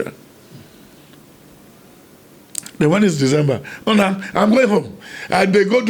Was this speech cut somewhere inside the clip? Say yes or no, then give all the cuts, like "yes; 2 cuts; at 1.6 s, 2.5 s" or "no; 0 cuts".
yes; 1 cut; at 1.0 s